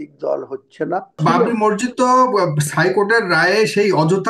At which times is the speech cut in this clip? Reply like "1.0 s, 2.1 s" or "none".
1.2 s